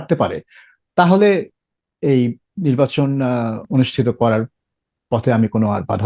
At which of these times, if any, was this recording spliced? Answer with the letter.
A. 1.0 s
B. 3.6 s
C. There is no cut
B